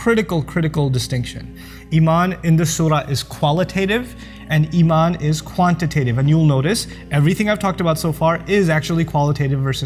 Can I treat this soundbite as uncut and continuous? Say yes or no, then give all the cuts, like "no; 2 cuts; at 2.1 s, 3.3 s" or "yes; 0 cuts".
yes; 0 cuts